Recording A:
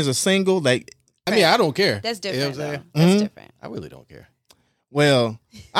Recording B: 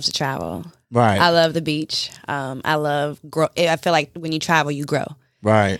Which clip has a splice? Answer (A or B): A